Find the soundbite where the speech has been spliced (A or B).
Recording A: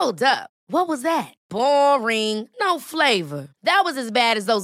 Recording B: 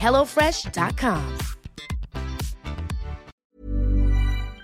B